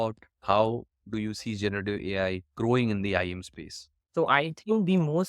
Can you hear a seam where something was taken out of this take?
yes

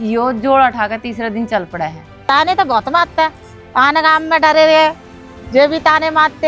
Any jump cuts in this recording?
yes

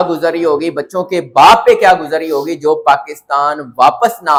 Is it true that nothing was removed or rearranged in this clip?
yes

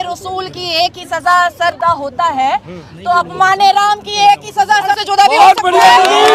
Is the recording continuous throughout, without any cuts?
yes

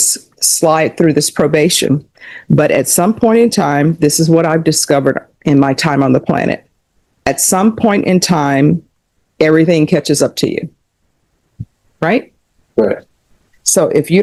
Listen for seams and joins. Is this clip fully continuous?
yes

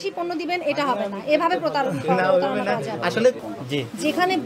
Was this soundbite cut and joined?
yes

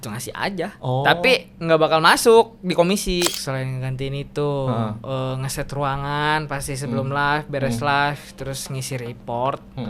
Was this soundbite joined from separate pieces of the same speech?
yes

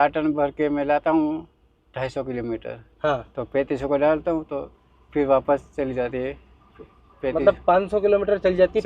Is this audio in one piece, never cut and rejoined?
yes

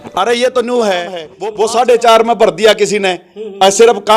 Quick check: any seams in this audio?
yes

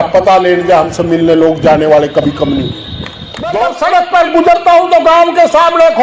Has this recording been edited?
yes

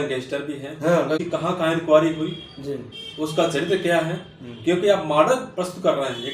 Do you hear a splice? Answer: yes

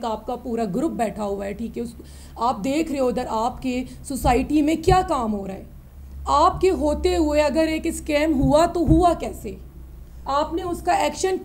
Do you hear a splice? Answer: no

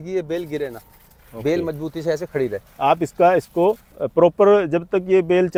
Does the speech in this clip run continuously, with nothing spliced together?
yes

